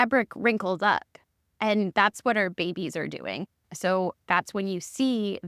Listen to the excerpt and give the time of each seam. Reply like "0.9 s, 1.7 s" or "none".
none

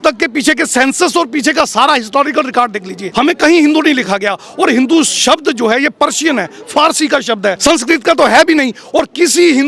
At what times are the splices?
3.0 s, 7.6 s

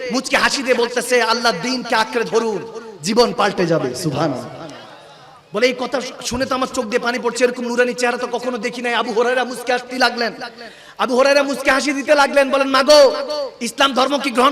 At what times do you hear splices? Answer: none

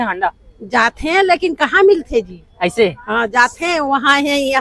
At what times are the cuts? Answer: none

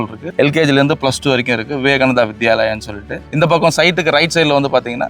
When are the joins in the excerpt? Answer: none

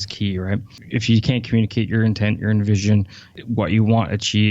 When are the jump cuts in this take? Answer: 3.4 s

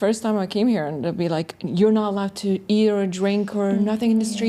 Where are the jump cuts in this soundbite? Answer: none

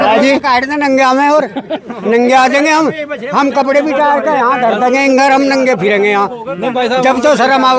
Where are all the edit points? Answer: none

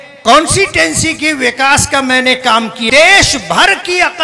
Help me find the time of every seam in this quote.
2.8 s

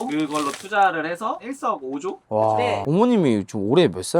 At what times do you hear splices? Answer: 2.8 s

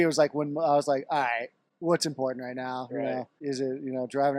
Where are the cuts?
1.6 s, 3.3 s

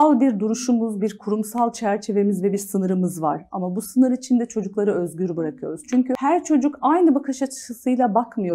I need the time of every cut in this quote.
6.2 s

